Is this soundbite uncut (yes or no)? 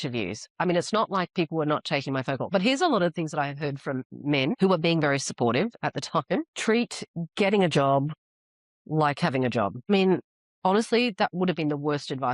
no